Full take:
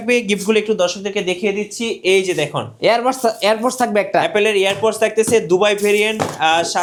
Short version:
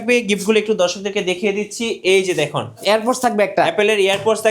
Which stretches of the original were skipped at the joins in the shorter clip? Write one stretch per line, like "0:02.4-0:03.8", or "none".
0:02.8-0:03.4